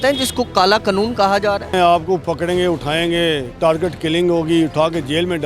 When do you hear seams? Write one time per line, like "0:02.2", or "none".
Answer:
0:01.7